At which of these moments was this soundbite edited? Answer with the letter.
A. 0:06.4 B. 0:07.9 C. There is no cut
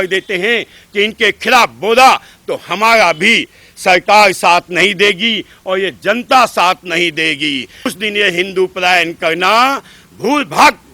B